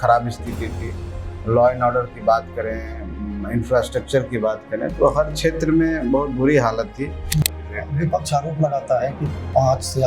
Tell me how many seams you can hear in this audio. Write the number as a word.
one